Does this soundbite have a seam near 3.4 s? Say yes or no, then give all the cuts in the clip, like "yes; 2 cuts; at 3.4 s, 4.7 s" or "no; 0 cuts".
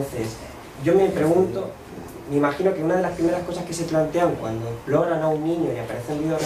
no; 1 cut; at 1.0 s